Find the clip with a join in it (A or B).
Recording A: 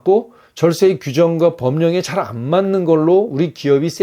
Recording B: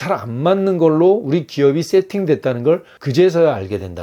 B